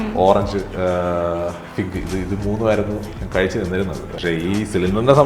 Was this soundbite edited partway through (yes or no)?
yes